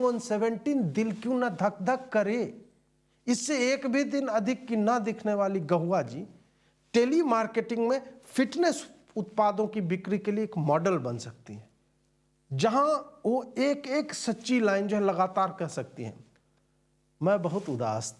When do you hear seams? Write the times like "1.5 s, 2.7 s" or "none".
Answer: none